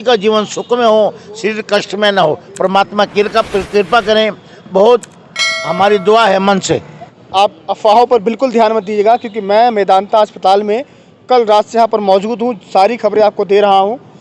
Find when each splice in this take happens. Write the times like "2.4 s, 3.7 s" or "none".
7.2 s